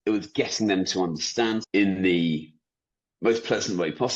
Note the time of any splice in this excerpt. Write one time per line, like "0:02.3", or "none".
0:01.6

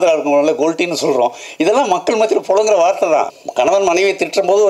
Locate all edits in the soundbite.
0:03.3

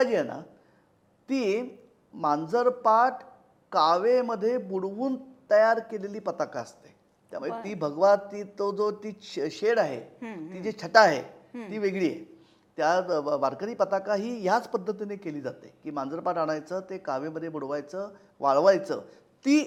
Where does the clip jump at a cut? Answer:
none

